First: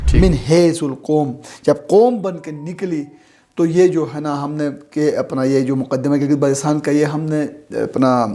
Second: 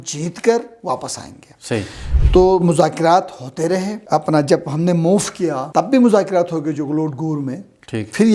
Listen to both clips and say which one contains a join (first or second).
second